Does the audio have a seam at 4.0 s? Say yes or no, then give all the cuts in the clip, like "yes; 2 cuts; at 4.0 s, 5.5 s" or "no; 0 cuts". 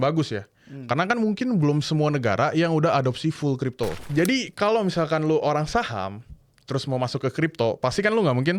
yes; 1 cut; at 4.0 s